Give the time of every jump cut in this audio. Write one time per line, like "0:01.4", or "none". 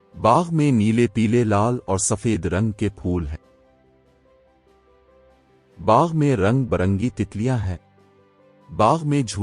none